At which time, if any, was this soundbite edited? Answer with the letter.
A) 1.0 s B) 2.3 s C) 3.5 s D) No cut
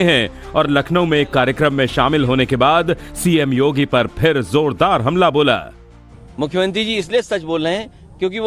A